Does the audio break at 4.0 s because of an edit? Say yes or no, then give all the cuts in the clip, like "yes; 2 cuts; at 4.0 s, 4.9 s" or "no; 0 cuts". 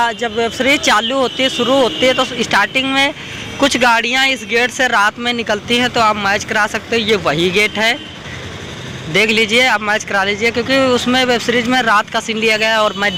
no; 0 cuts